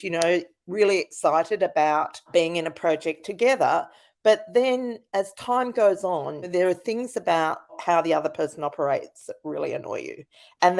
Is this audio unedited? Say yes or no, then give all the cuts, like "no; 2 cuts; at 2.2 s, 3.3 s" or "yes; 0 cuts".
no; 3 cuts; at 2.3 s, 6.5 s, 7.8 s